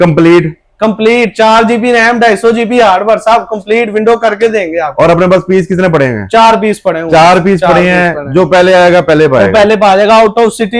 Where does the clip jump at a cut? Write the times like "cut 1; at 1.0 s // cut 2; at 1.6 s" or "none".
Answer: none